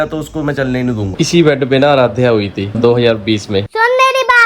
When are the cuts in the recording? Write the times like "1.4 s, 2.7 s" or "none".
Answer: 1.1 s, 2.8 s, 3.7 s